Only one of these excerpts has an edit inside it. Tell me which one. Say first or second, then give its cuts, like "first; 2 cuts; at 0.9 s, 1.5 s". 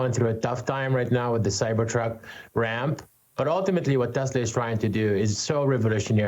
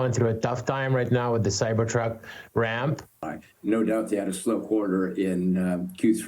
second; 1 cut; at 3.2 s